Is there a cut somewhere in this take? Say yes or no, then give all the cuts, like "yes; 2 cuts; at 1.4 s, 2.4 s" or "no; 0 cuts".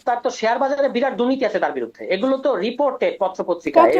no; 0 cuts